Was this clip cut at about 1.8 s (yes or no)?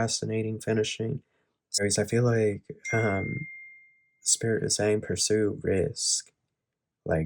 yes